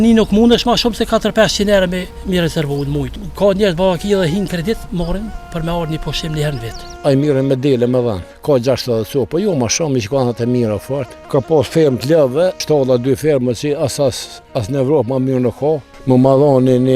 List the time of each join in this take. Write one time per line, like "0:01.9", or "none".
0:02.1
0:03.2
0:06.9
0:08.3
0:11.1
0:12.6
0:15.9